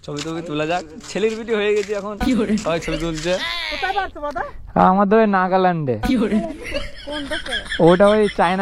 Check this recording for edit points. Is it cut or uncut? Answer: cut